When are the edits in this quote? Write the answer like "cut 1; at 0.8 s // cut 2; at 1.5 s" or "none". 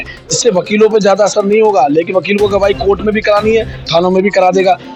none